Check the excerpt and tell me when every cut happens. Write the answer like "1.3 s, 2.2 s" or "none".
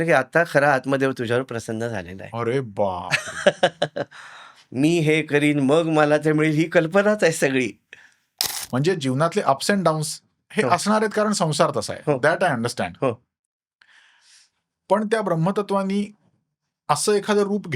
8.5 s